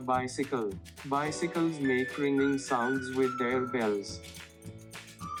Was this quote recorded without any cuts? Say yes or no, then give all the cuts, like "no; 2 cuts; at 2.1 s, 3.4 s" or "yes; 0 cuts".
yes; 0 cuts